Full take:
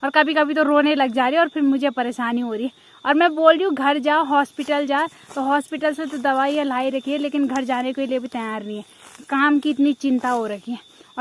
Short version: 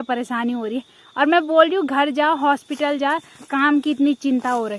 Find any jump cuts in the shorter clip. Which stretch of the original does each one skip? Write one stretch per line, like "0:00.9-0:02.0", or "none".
0:05.2-0:09.1